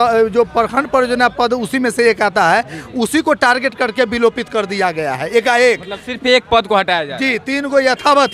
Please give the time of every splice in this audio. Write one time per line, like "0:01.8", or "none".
none